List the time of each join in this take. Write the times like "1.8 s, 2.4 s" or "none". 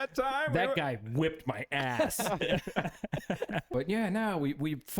3.7 s